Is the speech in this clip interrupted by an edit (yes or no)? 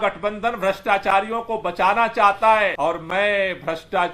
yes